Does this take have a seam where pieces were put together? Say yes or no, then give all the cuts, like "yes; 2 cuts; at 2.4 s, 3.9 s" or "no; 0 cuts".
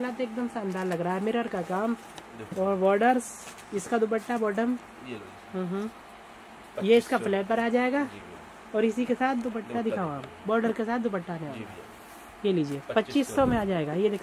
no; 0 cuts